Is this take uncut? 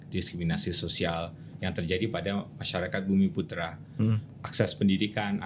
no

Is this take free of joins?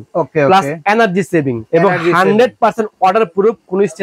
no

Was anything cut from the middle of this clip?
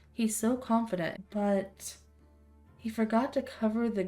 yes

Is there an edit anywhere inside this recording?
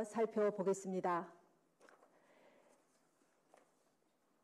no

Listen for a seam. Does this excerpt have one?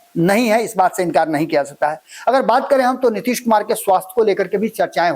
no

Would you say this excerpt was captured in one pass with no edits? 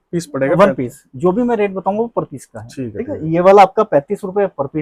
yes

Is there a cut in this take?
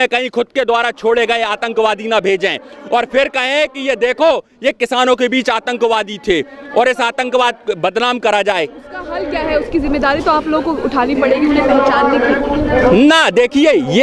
no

